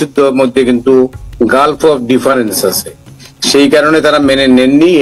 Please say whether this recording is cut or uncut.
uncut